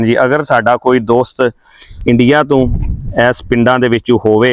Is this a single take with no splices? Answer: yes; 0 cuts

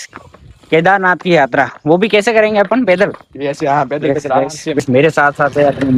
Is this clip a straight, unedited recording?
no; 1 cut; at 4.8 s

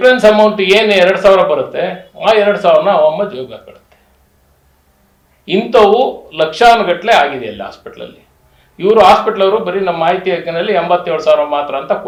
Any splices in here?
no; 0 cuts

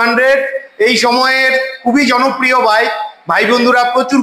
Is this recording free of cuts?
yes; 0 cuts

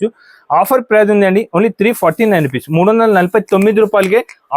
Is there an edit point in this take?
no; 0 cuts

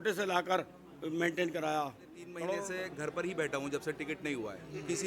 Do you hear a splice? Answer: yes; 1 cut; at 2.6 s

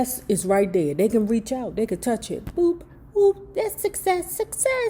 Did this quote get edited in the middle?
no; 0 cuts

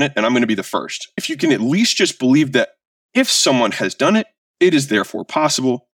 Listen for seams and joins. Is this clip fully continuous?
no; 1 cut; at 1.2 s

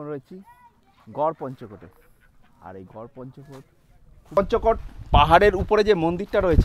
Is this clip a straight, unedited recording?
no; 1 cut; at 4.4 s

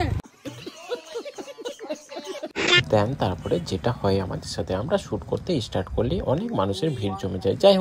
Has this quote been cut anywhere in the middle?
no; 0 cuts

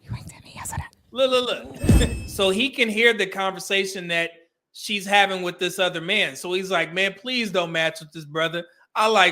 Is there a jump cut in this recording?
yes; 1 cut; at 2.1 s

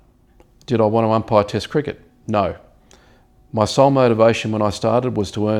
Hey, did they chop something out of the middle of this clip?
no; 0 cuts

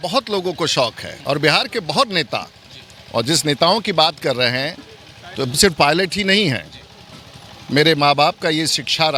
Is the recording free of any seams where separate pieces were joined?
yes; 0 cuts

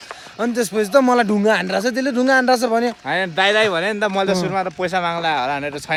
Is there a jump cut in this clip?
no; 0 cuts

